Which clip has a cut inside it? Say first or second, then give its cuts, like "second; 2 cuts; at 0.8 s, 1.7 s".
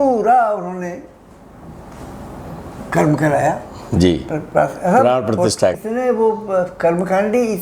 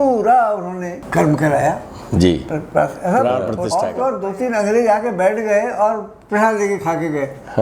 second; 2 cuts; at 1.0 s, 3.7 s